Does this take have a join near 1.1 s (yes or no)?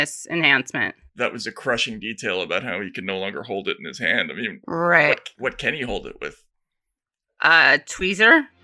yes